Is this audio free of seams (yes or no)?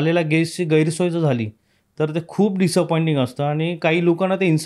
yes